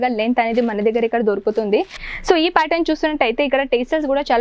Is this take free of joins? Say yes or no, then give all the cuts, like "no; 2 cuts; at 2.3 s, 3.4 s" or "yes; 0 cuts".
no; 1 cut; at 2.0 s